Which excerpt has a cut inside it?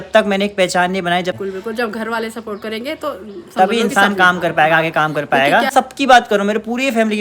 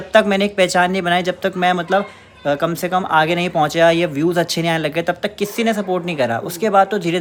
first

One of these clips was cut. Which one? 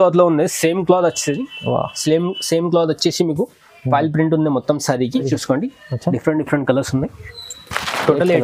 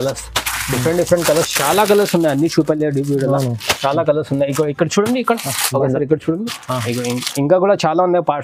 first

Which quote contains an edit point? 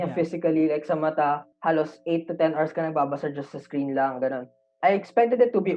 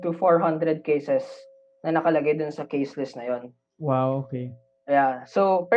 first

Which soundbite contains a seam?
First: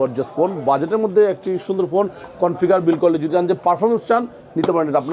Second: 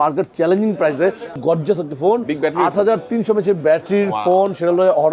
second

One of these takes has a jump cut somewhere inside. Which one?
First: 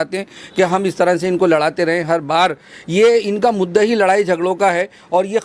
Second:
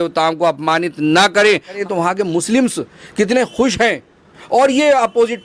second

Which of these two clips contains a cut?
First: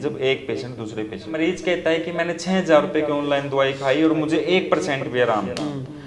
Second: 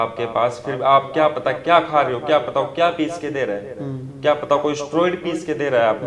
first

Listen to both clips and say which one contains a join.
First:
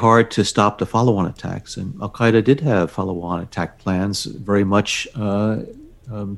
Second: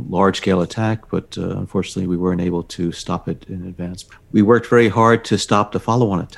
second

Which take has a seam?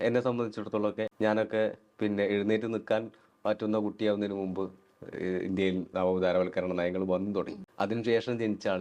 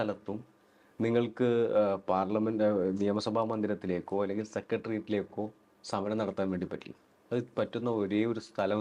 first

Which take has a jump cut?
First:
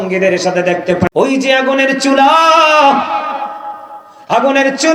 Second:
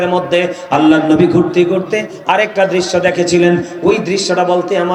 first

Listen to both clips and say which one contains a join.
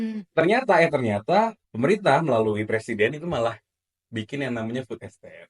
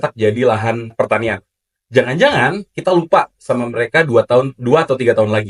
first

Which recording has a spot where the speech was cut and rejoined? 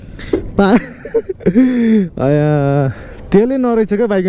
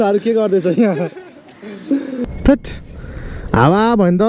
second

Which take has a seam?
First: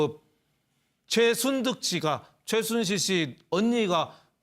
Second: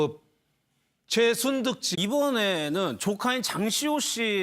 first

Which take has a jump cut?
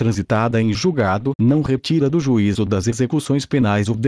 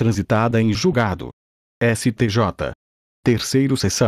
second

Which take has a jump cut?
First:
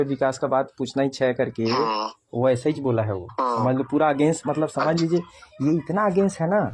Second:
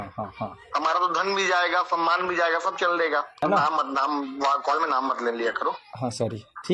second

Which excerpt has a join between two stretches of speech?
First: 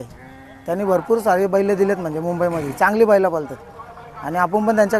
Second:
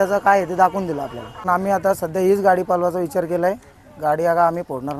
second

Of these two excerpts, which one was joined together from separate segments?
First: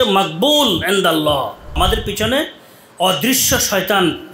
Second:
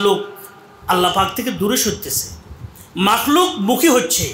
first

